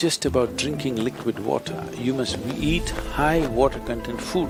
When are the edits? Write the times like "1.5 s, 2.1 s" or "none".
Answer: none

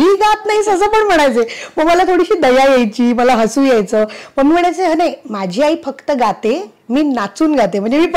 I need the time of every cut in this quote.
none

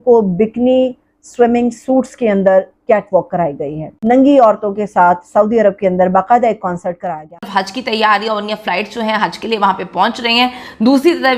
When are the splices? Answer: 3.9 s, 7.0 s

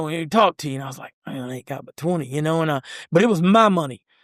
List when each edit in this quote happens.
none

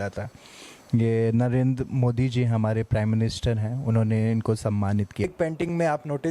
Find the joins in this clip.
5.3 s

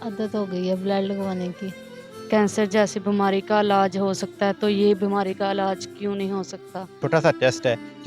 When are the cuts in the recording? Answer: 2.2 s, 7.0 s

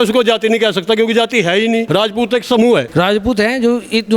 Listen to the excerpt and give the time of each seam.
1.9 s, 2.9 s

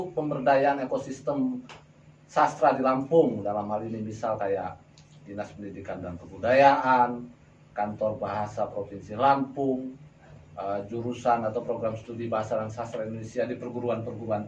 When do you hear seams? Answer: none

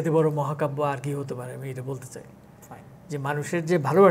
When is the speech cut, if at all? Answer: none

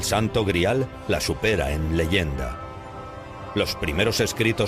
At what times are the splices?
2.3 s

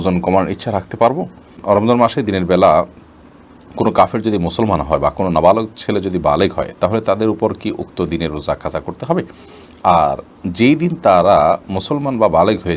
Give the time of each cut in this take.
1.6 s

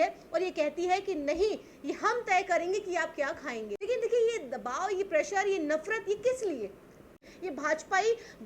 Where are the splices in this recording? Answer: 3.7 s, 7.2 s

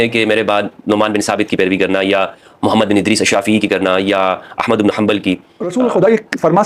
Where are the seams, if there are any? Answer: 5.6 s

